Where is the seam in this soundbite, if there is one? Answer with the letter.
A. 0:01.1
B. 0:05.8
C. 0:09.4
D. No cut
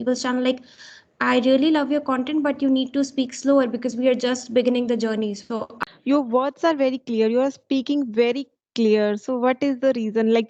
B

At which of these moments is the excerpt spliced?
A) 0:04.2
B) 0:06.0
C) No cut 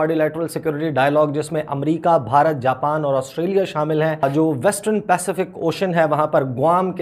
A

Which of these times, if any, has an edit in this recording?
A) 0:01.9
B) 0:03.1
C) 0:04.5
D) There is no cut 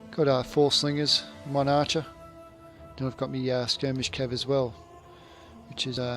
A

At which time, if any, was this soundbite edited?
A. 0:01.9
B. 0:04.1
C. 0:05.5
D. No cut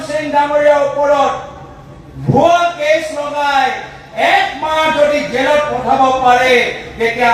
D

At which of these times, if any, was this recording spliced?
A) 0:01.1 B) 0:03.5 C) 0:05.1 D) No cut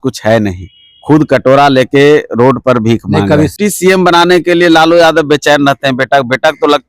B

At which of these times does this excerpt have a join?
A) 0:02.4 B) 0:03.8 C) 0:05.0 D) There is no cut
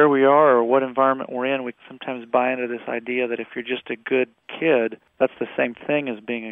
C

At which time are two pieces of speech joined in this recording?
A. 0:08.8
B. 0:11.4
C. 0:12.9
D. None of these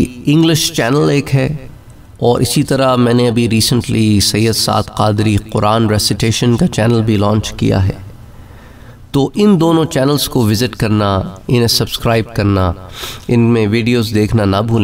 D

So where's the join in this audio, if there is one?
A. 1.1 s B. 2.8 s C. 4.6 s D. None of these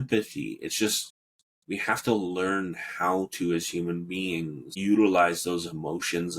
C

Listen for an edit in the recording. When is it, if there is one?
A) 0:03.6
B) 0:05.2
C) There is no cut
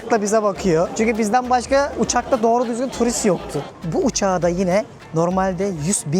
A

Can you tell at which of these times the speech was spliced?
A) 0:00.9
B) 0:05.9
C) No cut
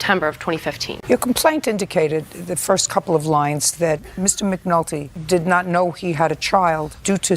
A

